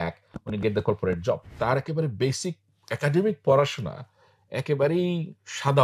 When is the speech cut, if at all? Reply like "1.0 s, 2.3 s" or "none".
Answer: 1.5 s